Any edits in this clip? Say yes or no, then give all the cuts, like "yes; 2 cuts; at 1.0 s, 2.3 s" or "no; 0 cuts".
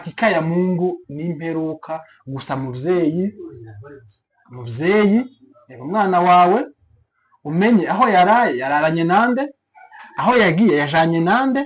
no; 0 cuts